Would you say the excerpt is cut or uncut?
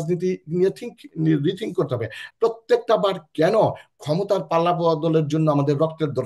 cut